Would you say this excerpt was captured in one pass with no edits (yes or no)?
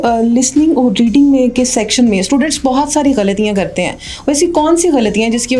yes